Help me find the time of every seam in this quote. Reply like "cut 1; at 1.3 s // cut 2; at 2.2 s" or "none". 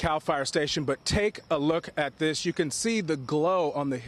none

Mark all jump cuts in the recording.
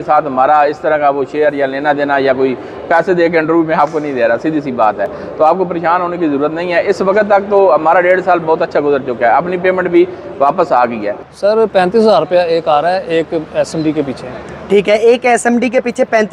none

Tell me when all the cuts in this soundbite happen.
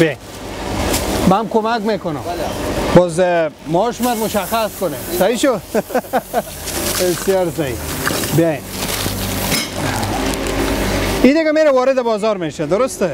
none

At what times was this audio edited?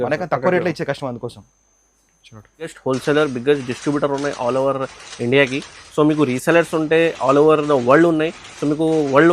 cut 1; at 2.7 s

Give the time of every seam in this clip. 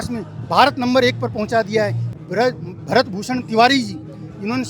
cut 1; at 2.0 s

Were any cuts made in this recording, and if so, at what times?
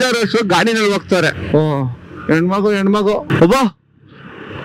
cut 1; at 1.3 s // cut 2; at 3.2 s

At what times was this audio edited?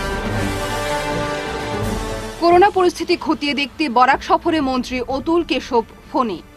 none

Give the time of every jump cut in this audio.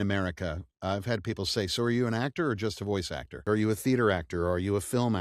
cut 1; at 3.4 s

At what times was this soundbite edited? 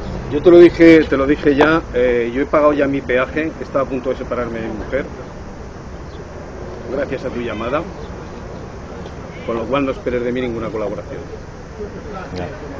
none

